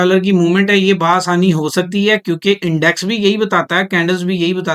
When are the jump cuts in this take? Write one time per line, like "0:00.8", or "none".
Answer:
none